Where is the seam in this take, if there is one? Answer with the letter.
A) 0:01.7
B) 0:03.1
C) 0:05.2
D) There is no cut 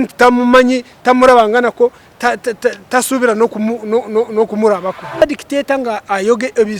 C